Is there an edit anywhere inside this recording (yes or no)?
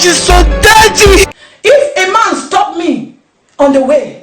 yes